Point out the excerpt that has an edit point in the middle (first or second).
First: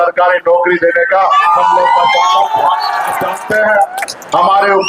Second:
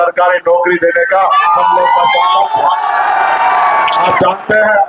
first